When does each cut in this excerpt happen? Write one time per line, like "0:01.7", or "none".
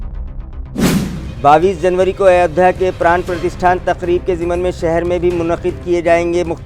none